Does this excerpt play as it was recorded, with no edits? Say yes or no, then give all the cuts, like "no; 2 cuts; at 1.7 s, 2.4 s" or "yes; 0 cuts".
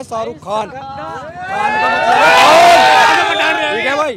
yes; 0 cuts